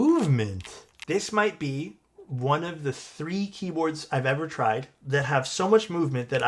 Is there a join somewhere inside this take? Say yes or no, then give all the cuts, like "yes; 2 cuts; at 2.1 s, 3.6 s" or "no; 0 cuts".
yes; 2 cuts; at 0.9 s, 4.9 s